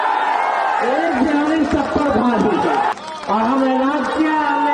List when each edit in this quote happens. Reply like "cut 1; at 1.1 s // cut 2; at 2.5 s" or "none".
cut 1; at 2.9 s